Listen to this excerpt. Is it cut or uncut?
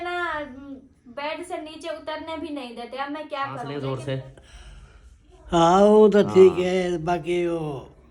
cut